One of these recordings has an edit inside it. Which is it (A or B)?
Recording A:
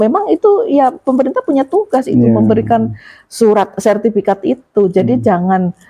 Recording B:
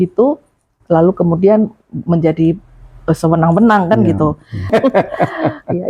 B